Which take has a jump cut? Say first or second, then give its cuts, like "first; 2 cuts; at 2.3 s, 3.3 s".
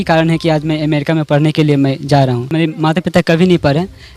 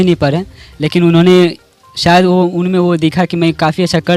first; 1 cut; at 2.5 s